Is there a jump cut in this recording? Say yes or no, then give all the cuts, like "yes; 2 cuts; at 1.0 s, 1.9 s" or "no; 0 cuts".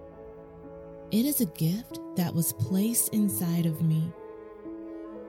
yes; 2 cuts; at 1.1 s, 4.1 s